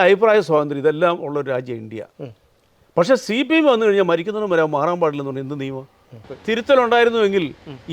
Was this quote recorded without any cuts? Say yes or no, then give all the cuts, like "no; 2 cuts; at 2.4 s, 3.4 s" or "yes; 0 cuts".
no; 1 cut; at 6.3 s